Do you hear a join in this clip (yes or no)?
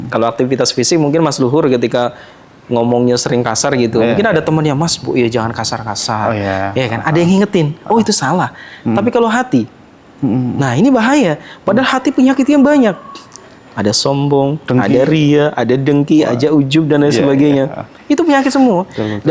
no